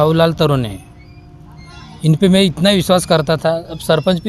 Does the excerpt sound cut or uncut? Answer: uncut